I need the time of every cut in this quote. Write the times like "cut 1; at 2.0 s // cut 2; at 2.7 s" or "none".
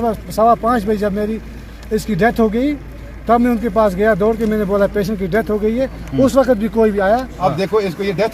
cut 1; at 7.3 s